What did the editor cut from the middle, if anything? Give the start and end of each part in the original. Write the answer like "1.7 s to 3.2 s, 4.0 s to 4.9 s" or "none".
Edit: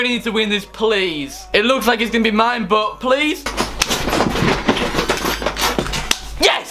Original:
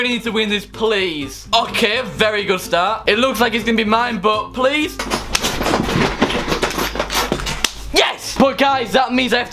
1.4 s to 3.0 s

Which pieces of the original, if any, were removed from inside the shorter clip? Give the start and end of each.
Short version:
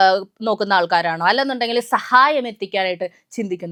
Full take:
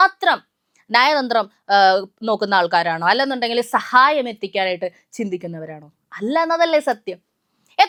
none

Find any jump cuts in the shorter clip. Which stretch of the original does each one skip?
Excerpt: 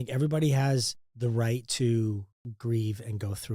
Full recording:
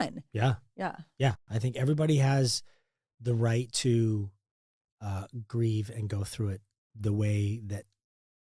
2.7 s to 3.1 s, 4.5 s to 5.3 s

